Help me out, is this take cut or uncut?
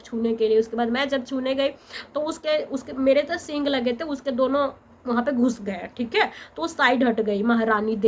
uncut